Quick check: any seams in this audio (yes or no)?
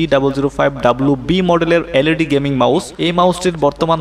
yes